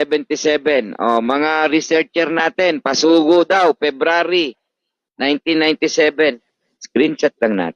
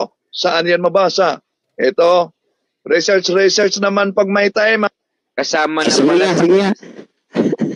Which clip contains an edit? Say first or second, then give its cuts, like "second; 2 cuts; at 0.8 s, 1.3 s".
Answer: first; 1 cut; at 6.5 s